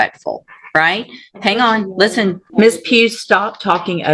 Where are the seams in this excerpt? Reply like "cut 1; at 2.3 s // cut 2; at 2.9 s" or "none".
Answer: cut 1; at 2.4 s